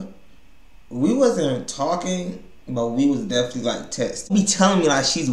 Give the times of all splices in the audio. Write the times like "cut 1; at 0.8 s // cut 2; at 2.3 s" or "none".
cut 1; at 4.3 s